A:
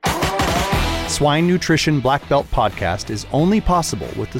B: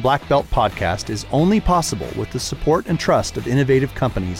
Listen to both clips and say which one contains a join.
A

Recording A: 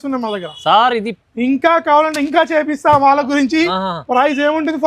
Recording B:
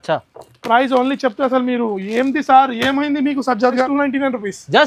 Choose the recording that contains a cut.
B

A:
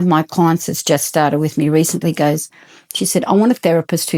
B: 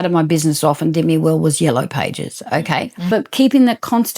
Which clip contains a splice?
B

